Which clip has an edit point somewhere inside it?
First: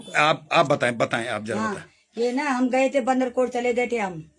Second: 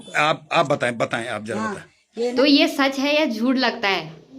second; 1 cut; at 2.3 s

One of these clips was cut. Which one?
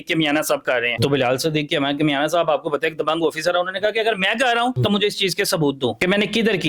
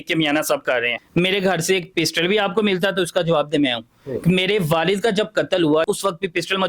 second; 2 cuts; at 1.0 s, 5.9 s

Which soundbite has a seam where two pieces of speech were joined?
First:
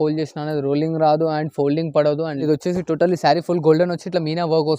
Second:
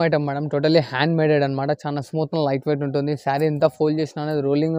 first; 1 cut; at 2.4 s

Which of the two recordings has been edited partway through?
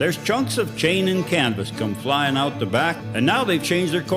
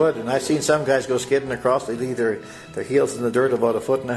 first; 1 cut; at 3.0 s

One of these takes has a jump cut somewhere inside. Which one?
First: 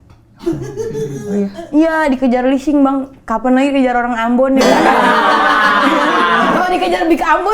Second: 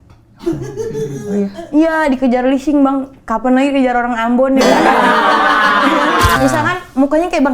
second; 1 cut; at 6.4 s

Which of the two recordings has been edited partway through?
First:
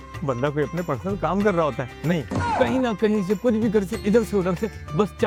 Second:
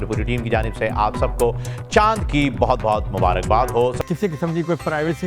second; 1 cut; at 4.0 s

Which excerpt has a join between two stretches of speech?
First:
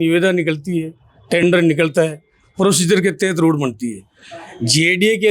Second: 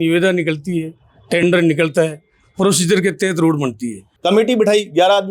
second; 1 cut; at 4.1 s

